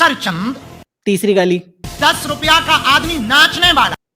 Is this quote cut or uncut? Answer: cut